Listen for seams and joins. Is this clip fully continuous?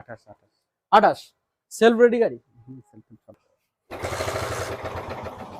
no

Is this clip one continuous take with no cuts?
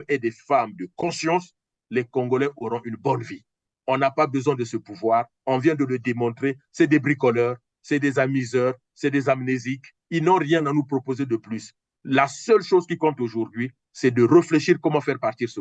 yes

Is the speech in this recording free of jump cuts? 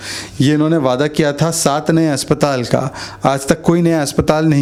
yes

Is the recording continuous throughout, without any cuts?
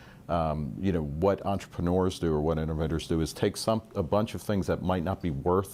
yes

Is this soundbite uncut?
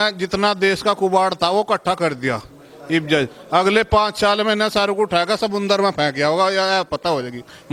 yes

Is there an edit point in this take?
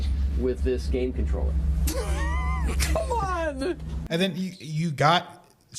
yes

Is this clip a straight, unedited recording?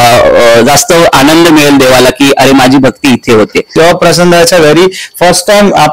no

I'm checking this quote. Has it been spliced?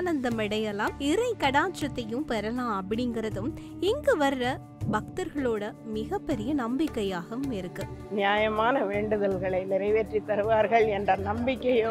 yes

